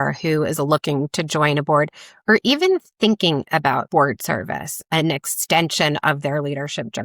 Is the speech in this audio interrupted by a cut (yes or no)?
yes